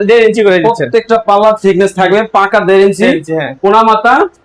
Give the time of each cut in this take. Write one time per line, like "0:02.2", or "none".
none